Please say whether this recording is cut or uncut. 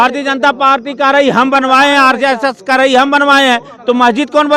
uncut